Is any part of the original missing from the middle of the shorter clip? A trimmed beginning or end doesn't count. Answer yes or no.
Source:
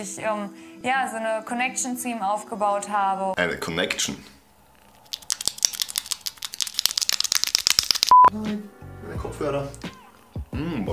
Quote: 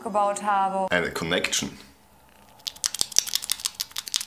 no